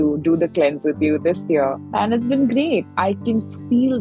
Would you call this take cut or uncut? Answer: uncut